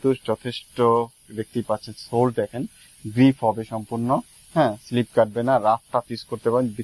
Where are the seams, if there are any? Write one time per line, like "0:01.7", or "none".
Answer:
none